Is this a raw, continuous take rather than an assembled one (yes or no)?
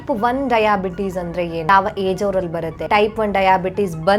no